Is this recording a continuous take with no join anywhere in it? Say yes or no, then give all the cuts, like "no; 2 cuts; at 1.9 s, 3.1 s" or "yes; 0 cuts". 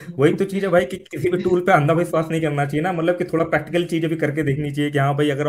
yes; 0 cuts